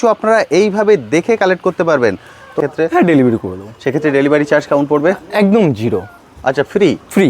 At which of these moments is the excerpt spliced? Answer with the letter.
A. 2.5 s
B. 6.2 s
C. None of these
A